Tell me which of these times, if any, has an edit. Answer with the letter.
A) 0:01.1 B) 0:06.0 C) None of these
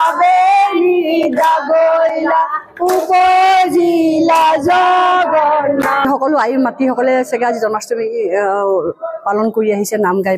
B